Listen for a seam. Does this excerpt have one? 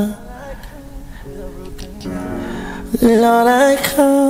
no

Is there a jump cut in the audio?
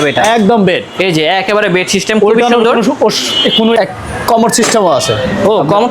yes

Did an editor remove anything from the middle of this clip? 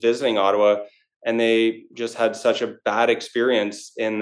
no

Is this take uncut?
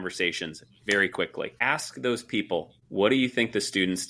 no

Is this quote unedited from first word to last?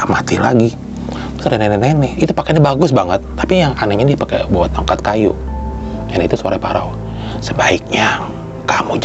yes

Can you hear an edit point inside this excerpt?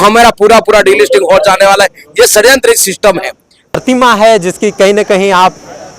yes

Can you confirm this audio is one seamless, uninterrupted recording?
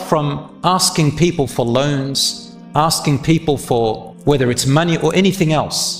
no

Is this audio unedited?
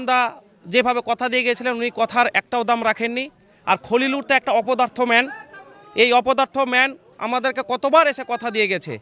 yes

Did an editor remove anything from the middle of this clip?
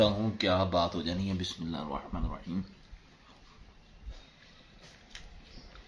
no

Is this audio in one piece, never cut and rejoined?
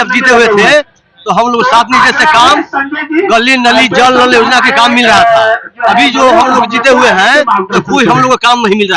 yes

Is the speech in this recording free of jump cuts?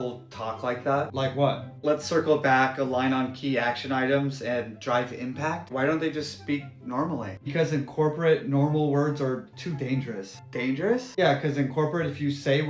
yes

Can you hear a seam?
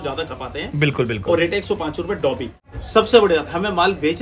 yes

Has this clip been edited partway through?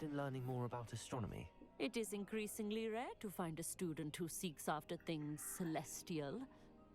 no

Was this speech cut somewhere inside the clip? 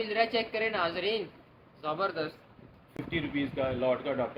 no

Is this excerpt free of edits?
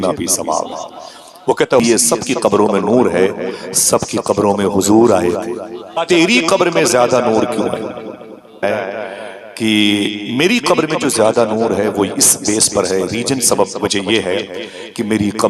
no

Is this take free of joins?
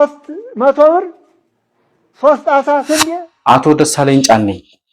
no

